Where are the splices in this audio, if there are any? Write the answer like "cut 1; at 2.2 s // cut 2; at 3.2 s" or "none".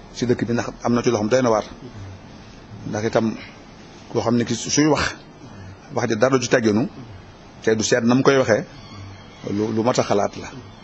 cut 1; at 6.3 s